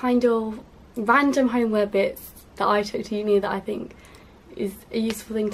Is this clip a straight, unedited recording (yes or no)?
no